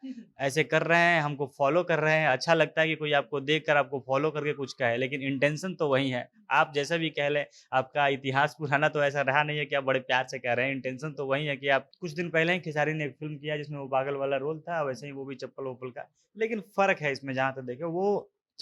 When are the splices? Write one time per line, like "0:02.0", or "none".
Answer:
0:12.0